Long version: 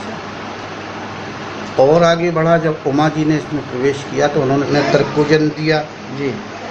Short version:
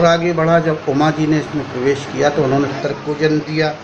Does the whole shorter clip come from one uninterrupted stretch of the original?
no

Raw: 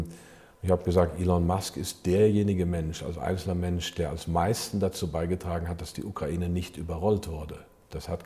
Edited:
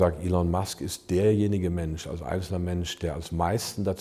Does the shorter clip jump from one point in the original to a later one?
no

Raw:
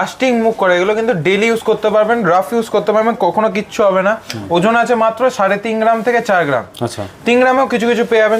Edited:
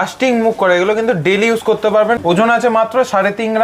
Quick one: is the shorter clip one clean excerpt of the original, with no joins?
no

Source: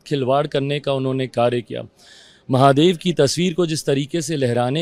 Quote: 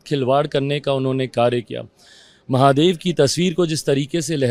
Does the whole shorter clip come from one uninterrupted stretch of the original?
yes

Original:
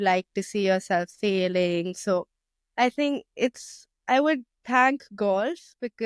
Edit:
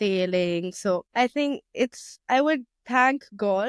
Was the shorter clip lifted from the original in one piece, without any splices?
no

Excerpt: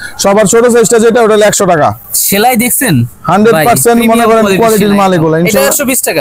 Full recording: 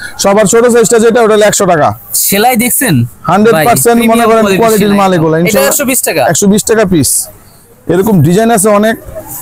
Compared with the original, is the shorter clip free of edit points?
yes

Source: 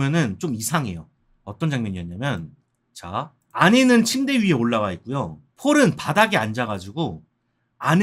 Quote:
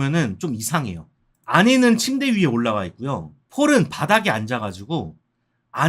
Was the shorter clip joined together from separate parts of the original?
yes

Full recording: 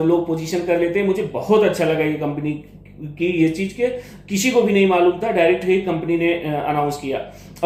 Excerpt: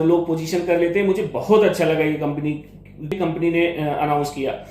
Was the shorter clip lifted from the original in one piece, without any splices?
no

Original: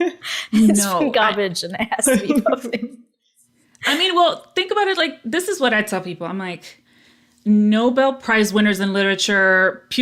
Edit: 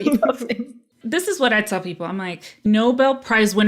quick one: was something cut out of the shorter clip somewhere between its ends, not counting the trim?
yes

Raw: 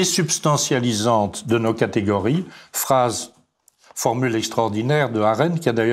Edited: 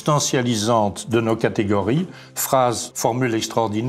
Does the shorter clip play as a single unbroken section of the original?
no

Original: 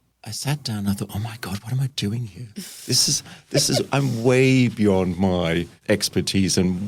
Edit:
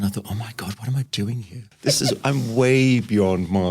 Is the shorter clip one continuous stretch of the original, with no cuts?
no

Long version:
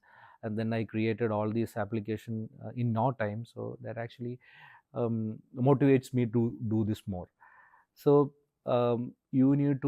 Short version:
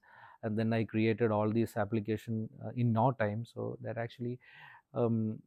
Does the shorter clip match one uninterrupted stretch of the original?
yes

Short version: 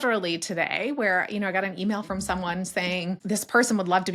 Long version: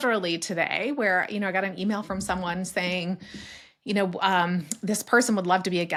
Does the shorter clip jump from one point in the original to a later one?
yes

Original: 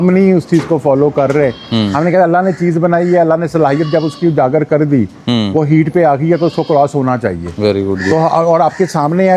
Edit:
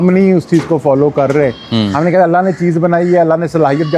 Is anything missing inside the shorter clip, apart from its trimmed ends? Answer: no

